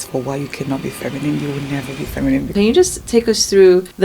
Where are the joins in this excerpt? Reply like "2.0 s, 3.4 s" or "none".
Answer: 2.5 s

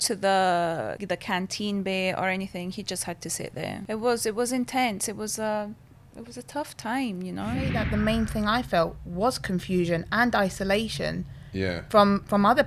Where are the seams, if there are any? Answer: 1.0 s, 3.8 s, 7.8 s

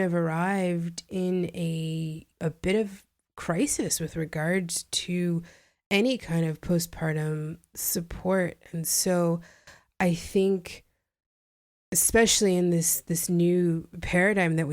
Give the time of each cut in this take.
2.2 s

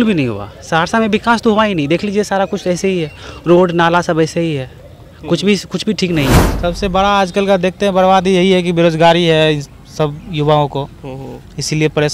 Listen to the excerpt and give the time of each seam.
6.5 s

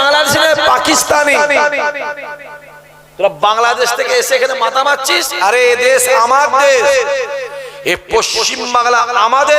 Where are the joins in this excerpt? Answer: none

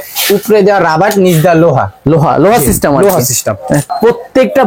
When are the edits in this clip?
none

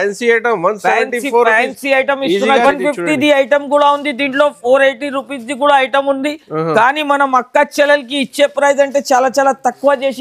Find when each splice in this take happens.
2.6 s

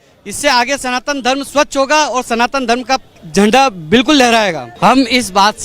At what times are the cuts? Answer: 3.2 s, 4.7 s

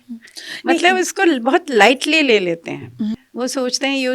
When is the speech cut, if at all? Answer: 3.1 s

